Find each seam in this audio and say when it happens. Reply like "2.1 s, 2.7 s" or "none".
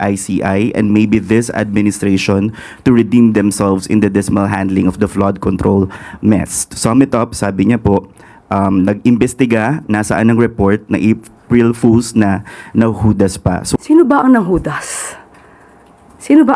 13.8 s